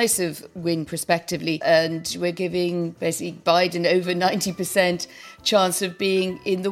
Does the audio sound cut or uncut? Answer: cut